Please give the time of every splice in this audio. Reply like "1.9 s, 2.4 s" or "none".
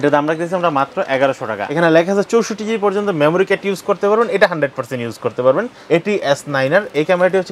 1.7 s, 5.8 s